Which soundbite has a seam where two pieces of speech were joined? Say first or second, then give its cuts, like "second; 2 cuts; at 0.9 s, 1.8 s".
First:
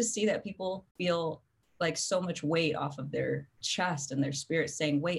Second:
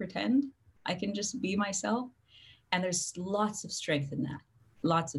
first; 2 cuts; at 0.8 s, 3.6 s